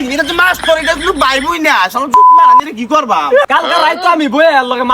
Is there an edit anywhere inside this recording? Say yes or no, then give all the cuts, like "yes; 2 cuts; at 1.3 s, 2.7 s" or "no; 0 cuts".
yes; 1 cut; at 3.5 s